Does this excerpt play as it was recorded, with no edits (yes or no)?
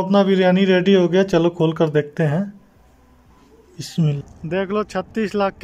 no